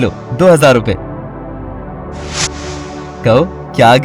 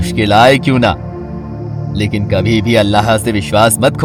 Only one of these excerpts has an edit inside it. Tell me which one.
first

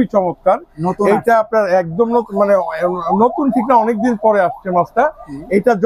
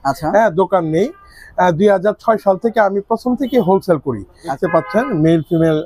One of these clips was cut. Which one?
second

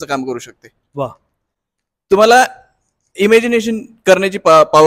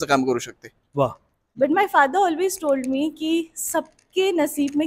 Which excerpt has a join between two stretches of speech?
second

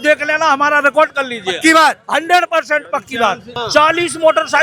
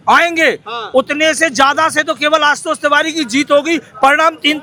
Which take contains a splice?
first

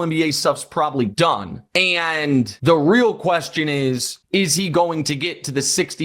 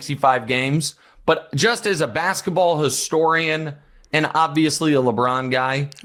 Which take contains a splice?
first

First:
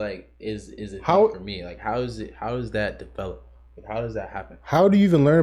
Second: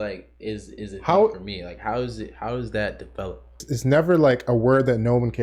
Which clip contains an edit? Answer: second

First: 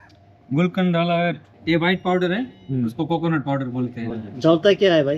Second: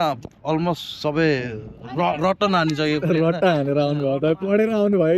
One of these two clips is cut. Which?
first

